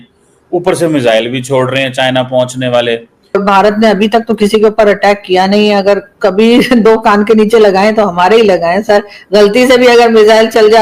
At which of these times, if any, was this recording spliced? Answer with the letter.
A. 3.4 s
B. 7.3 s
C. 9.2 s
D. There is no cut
A